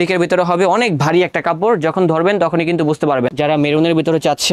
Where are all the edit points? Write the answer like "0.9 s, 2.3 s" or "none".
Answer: 3.3 s